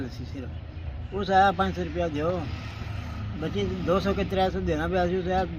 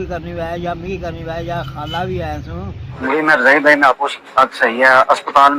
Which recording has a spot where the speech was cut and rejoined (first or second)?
second